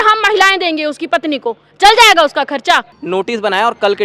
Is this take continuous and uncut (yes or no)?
no